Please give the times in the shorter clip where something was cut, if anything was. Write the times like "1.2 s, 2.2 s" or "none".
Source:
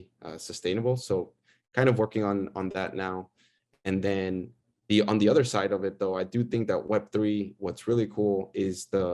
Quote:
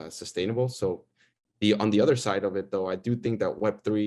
1.3 s